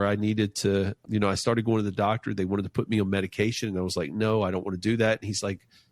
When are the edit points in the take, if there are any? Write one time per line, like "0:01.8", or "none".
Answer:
0:01.0